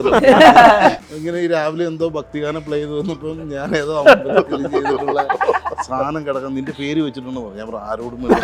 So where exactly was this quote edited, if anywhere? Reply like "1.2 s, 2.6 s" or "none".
1.0 s